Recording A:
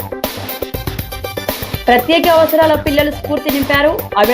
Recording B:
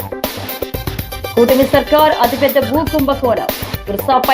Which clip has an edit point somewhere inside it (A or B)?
B